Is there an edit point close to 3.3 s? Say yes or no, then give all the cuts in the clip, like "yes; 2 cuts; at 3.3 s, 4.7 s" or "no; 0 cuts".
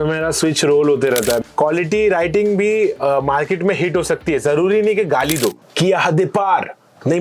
no; 2 cuts; at 1.5 s, 5.6 s